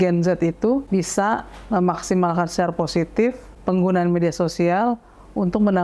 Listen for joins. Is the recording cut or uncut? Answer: uncut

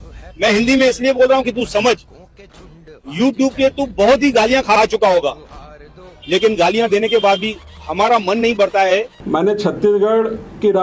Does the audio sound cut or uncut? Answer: cut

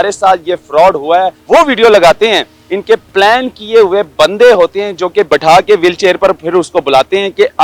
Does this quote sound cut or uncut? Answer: cut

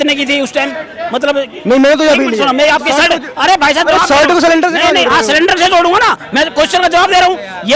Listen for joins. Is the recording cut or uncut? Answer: uncut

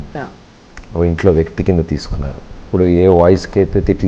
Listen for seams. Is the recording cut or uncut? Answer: cut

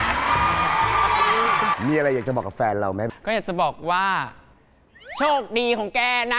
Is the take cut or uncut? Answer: cut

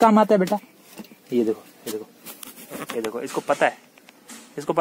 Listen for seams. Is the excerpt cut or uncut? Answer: uncut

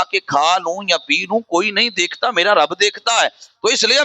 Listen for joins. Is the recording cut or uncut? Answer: uncut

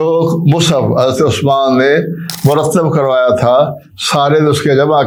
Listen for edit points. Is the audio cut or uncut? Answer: uncut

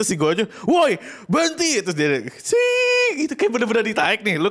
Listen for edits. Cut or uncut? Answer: uncut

